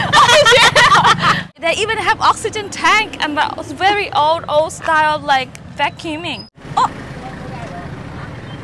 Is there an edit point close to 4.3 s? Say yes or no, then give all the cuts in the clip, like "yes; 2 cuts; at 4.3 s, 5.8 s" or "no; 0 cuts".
no; 2 cuts; at 1.4 s, 6.5 s